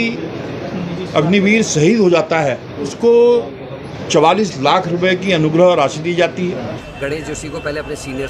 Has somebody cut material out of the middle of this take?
yes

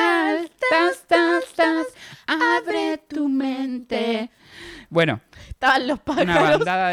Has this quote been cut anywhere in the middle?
no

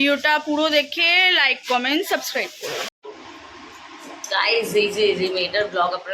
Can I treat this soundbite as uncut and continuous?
no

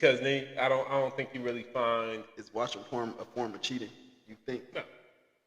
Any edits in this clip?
yes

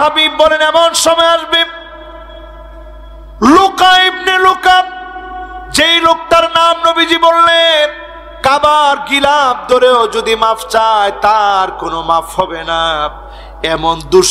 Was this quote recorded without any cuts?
yes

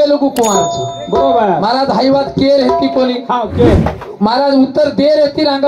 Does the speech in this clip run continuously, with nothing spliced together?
yes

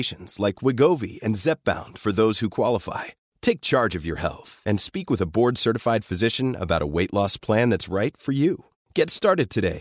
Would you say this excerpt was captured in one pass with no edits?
yes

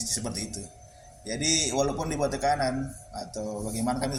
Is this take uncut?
yes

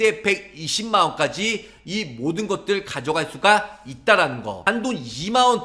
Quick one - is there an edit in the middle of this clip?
yes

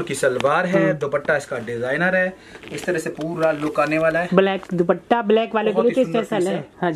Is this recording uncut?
yes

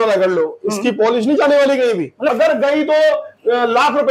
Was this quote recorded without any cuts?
no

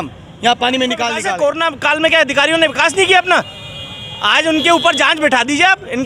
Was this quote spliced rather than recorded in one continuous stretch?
yes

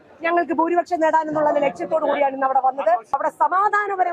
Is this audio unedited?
no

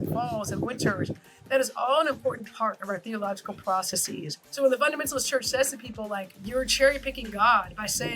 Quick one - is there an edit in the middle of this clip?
yes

